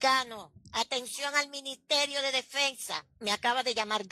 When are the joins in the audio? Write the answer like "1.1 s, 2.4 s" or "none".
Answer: 2.8 s